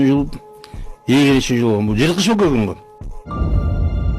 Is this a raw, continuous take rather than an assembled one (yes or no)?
no